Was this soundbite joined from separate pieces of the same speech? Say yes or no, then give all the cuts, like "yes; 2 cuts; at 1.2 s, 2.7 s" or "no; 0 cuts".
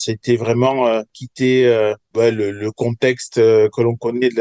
yes; 2 cuts; at 1.2 s, 2.0 s